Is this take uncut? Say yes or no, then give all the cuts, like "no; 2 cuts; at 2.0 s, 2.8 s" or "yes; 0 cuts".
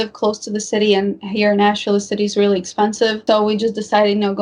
yes; 0 cuts